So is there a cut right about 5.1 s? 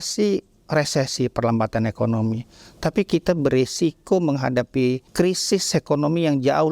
yes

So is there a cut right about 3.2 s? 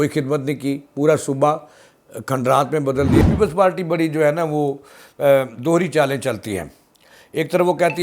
yes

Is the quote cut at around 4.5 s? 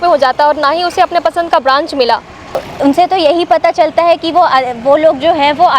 no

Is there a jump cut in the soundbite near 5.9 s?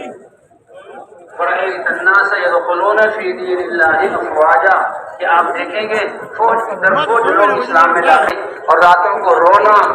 no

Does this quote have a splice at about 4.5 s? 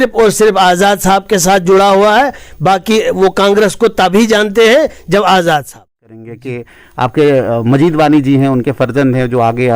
no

